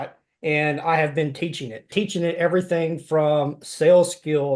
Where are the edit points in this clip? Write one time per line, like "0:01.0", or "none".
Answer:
0:01.9